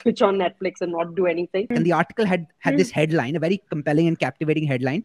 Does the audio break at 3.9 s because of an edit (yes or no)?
no